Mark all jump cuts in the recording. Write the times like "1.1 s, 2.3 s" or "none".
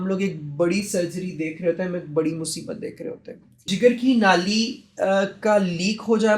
3.7 s